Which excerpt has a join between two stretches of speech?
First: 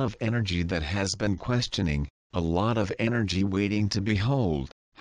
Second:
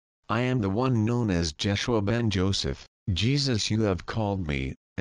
first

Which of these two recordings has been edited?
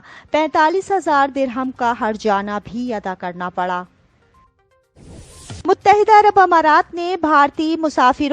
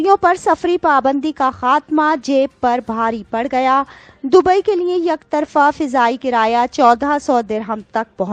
first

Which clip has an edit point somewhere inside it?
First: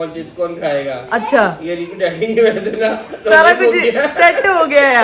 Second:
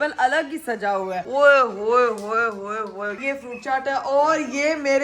second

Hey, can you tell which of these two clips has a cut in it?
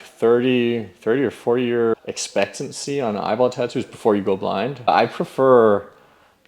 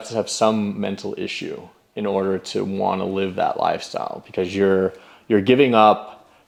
first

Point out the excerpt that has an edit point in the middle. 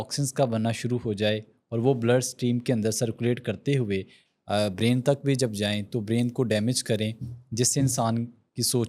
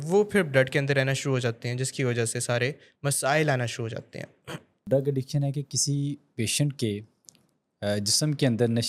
second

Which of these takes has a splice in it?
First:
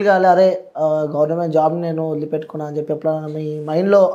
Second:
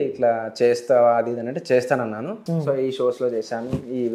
second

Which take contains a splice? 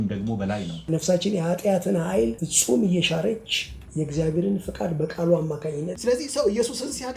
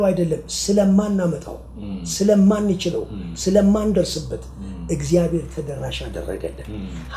first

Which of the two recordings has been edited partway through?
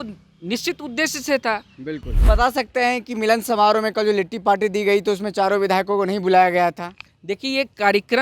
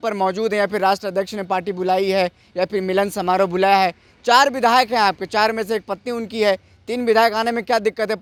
first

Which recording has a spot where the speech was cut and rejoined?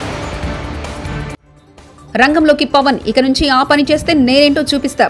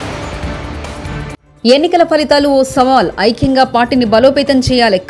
second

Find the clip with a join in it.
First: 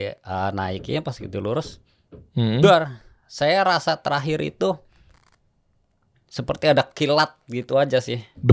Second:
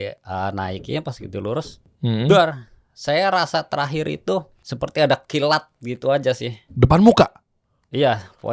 second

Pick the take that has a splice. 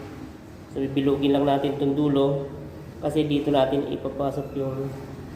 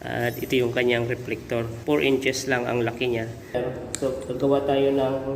second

